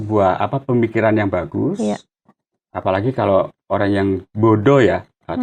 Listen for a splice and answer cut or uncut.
uncut